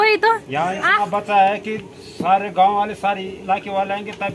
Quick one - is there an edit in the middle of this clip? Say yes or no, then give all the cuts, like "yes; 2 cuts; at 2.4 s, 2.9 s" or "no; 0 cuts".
no; 0 cuts